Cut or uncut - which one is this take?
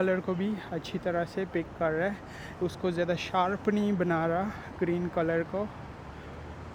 uncut